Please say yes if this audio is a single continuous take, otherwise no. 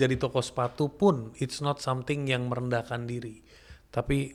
yes